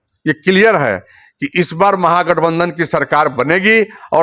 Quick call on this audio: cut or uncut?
uncut